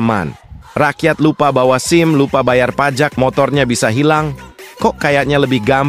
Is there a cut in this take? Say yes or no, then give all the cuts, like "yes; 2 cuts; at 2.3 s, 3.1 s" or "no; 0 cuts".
no; 0 cuts